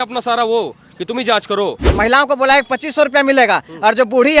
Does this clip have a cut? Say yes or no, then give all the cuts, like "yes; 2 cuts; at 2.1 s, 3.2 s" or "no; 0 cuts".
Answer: yes; 1 cut; at 1.8 s